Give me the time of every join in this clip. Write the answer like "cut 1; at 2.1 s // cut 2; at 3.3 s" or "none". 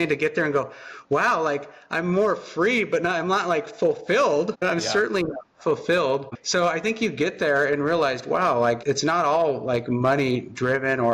cut 1; at 6.3 s